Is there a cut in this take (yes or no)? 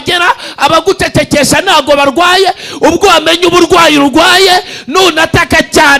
no